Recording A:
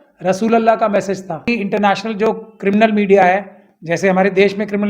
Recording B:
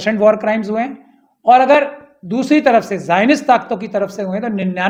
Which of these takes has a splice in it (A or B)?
A